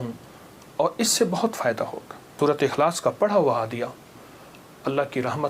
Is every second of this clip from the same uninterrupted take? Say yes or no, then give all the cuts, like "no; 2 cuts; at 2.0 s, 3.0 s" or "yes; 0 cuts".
no; 1 cut; at 2.4 s